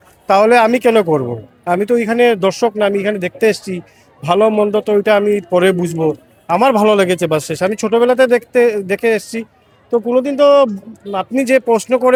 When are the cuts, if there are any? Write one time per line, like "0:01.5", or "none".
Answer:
none